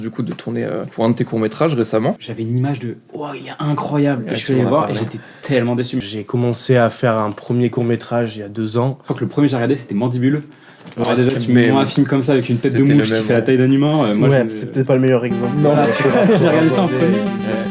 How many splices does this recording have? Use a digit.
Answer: 4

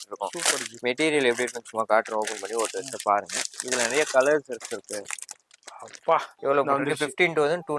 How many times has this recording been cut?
1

